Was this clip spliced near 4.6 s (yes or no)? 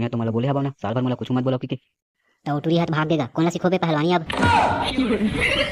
yes